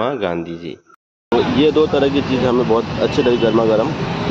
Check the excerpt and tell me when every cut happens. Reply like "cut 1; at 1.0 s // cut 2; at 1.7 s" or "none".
cut 1; at 1.3 s